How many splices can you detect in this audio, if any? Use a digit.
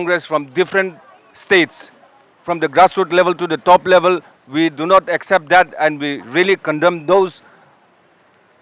0